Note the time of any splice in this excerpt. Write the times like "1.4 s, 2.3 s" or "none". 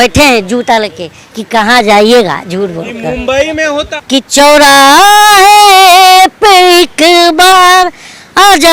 3.8 s

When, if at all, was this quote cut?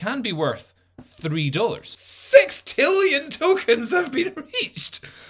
1.9 s

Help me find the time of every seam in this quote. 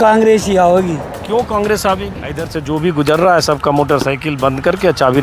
2.5 s

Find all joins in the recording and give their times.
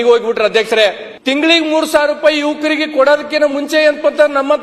1.1 s

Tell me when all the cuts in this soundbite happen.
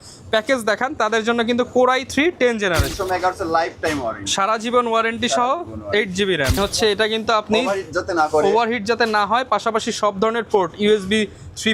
2.9 s, 6.6 s

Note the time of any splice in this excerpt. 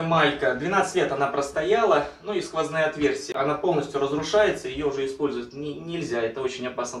3.3 s

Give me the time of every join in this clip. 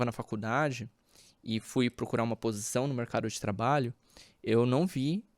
none

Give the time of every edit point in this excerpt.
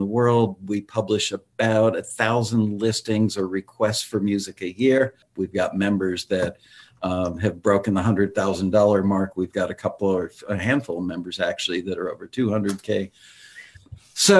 5.3 s

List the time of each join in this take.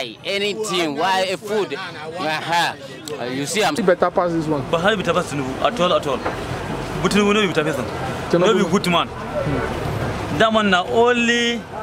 3.8 s

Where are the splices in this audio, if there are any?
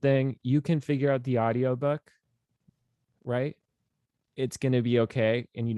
4.2 s

